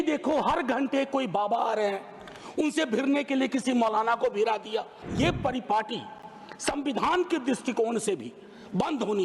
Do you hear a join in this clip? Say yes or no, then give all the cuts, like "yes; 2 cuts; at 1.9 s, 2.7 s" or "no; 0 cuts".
yes; 1 cut; at 5.0 s